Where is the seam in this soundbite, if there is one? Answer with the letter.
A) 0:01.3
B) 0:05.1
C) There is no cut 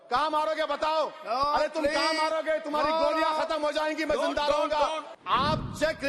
B